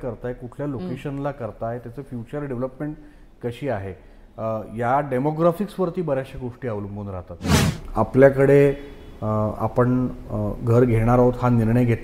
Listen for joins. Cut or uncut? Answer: cut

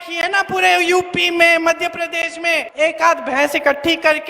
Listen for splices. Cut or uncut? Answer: cut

